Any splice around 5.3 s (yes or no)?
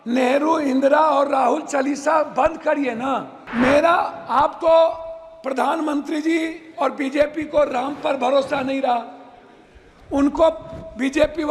no